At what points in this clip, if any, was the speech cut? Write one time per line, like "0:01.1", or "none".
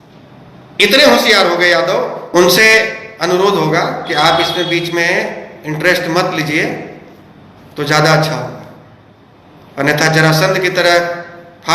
0:02.2